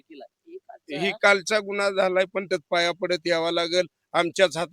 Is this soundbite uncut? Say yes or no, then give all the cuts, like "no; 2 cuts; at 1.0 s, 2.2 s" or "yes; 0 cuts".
no; 1 cut; at 2.5 s